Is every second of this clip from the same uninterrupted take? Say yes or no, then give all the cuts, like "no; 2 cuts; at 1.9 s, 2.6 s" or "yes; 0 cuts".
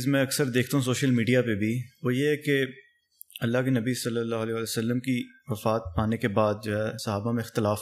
yes; 0 cuts